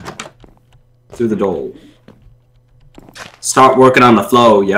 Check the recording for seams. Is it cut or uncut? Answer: uncut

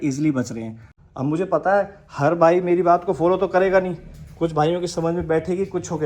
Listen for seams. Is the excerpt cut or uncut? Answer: cut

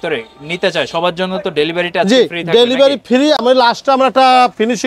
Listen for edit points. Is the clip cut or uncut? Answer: uncut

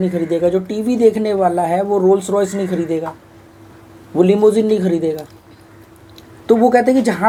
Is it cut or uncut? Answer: uncut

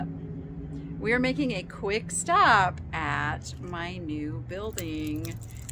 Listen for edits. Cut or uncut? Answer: uncut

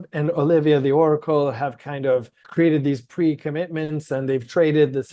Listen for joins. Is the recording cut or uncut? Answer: cut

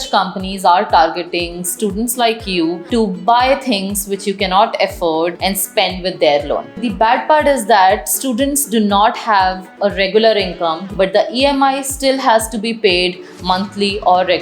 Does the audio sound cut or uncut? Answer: cut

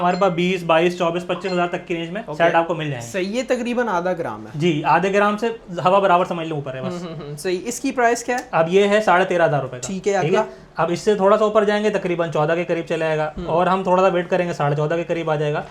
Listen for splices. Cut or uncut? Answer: uncut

